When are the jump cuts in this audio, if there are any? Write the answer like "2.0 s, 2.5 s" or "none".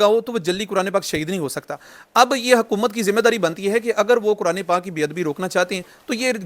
none

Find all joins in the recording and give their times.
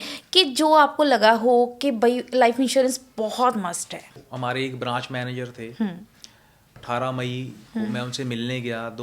4.2 s, 6.7 s

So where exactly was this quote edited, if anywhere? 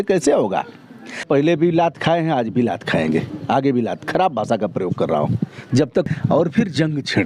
1.2 s, 6.1 s

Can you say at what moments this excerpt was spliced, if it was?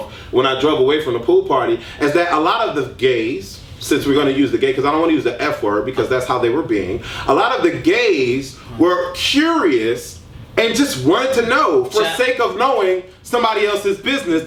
none

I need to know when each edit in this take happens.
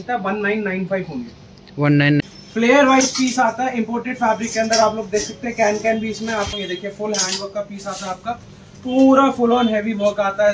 2.2 s, 6.5 s

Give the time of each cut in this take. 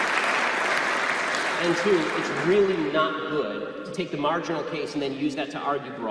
3.6 s

